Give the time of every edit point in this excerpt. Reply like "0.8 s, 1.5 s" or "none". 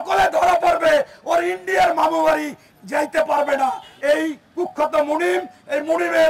3.9 s